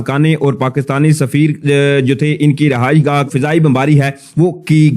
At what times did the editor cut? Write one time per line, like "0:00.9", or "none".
0:03.3